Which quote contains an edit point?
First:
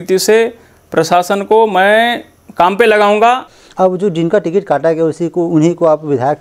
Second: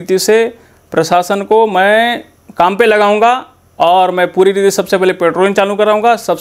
first; 1 cut; at 3.6 s

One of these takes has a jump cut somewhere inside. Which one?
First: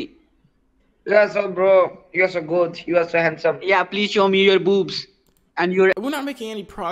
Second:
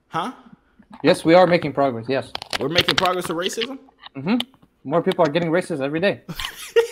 first; 1 cut; at 6.0 s

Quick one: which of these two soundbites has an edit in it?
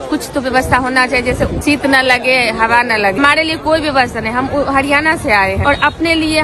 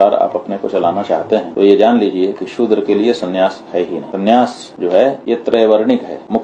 first; 3 cuts; at 1.6 s, 3.2 s, 5.6 s

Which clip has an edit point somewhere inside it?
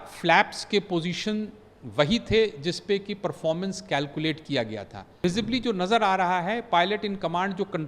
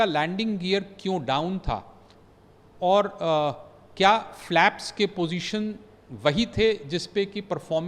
first; 1 cut; at 5.2 s

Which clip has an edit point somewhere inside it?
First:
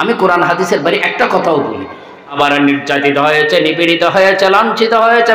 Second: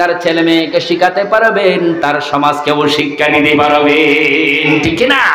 first; 1 cut; at 2.4 s

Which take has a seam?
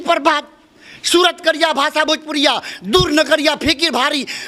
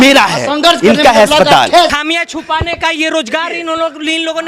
second; 1 cut; at 2.0 s

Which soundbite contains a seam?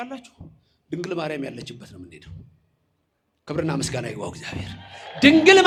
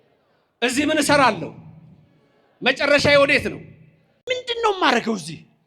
second; 1 cut; at 4.1 s

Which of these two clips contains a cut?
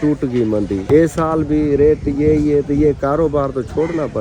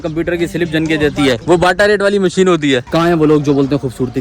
second; 2 cuts; at 1.4 s, 2.9 s

